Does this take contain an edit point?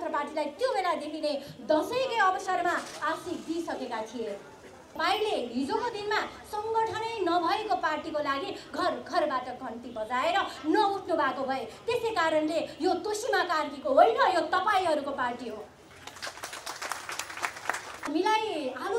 yes; 2 cuts; at 5.0 s, 18.1 s

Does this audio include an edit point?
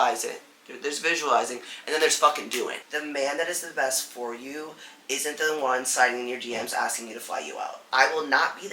yes; 2 cuts; at 2.9 s, 7.8 s

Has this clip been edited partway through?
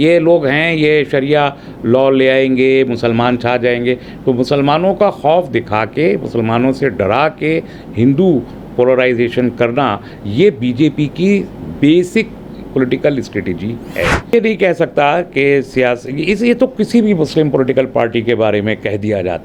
yes; 1 cut; at 14.3 s

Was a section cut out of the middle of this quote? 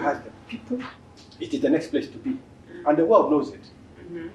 yes; 1 cut; at 1.0 s

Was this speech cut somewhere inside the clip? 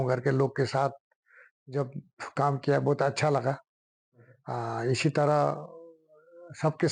no; 0 cuts

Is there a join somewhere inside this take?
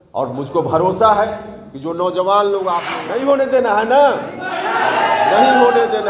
yes; 1 cut; at 2.9 s

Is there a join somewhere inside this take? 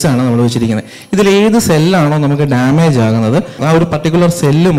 yes; 1 cut; at 3.6 s

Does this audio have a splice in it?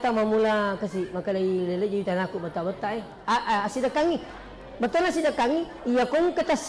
no; 0 cuts

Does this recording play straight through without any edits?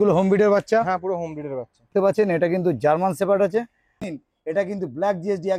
no; 2 cuts; at 2.1 s, 4.0 s

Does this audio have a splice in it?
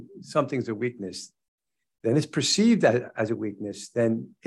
no; 0 cuts

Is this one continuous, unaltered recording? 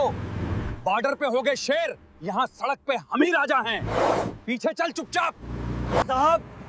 yes; 0 cuts

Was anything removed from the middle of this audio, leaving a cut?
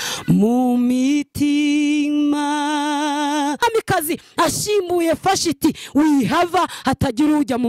yes; 1 cut; at 3.6 s

